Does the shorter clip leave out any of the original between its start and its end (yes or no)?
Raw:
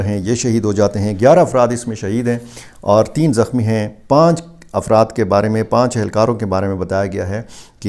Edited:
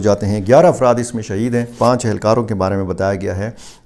yes